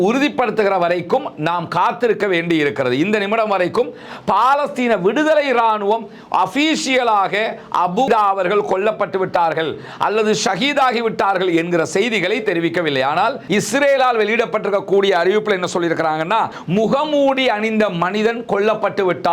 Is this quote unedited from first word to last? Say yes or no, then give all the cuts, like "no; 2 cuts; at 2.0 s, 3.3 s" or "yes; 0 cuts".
no; 3 cuts; at 8.1 s, 12.9 s, 16.6 s